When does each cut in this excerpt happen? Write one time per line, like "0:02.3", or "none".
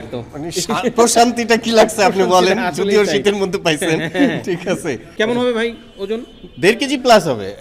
none

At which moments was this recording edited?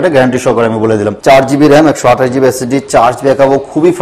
0:01.1

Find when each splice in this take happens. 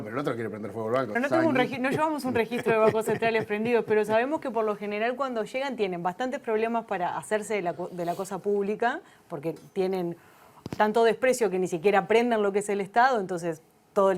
0:01.2

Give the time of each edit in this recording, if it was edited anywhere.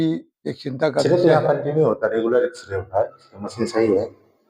0:01.0

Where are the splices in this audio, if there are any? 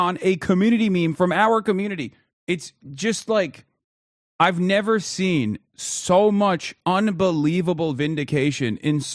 0:02.2

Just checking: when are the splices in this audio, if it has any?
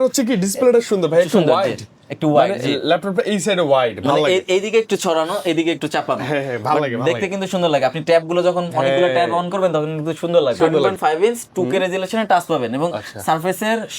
0:10.9

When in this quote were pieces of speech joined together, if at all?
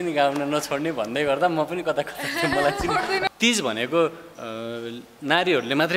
0:03.3

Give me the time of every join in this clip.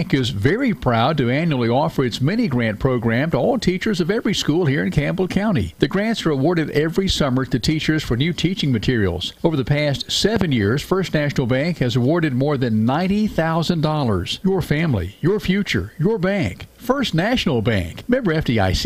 0:14.3

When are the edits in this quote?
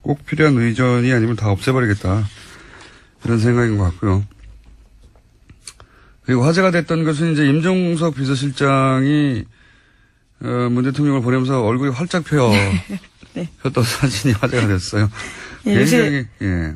0:08.8

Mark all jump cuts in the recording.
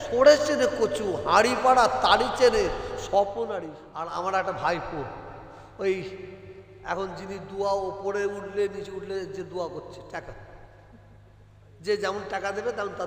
0:03.7

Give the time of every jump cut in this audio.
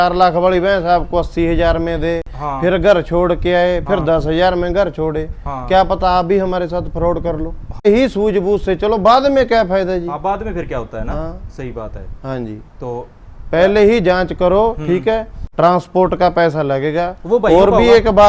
0:07.8
0:15.4

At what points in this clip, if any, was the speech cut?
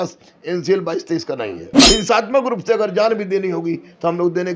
0:01.6

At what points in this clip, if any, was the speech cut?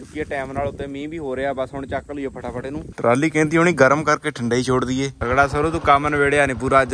0:02.8
0:05.2

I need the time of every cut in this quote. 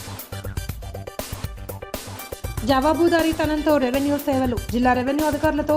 0:01.1
0:02.3

